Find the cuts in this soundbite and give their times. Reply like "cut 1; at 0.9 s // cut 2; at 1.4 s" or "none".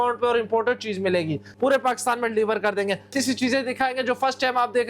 cut 1; at 1.4 s // cut 2; at 3.1 s